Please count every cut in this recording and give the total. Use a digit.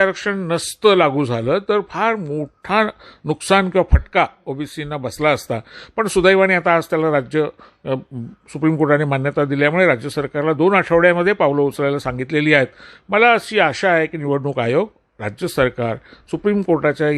0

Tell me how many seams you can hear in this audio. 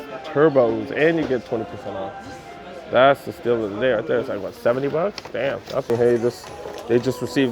1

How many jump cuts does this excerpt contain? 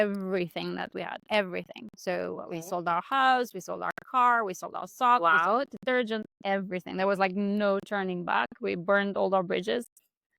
0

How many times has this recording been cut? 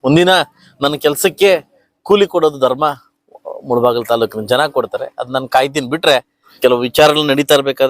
1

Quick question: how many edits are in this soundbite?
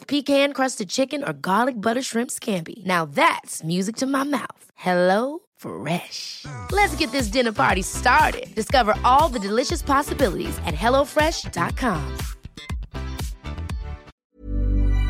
1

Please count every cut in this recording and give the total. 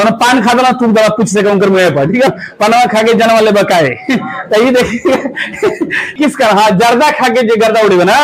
2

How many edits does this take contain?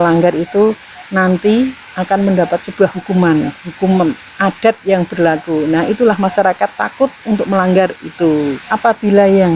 1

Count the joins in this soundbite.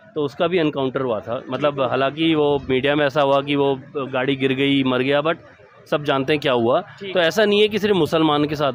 0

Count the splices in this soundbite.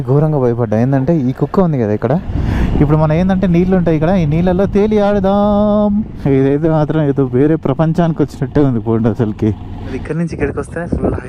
3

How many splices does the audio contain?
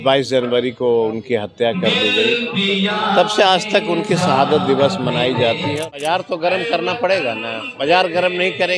1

